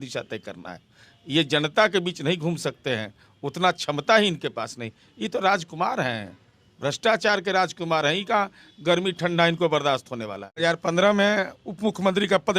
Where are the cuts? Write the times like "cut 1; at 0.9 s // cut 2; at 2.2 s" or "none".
cut 1; at 10.6 s